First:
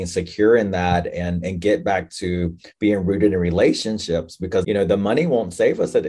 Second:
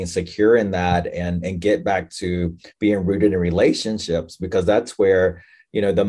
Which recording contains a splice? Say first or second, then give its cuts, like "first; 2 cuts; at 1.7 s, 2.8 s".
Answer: first; 1 cut; at 4.6 s